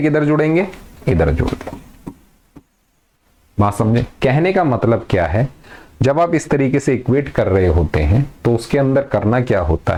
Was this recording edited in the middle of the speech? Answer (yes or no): no